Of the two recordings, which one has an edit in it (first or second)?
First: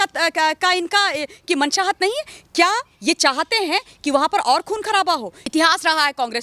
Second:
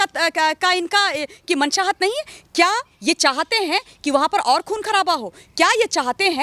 first